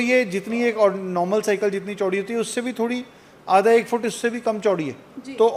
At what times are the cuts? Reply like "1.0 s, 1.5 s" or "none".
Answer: none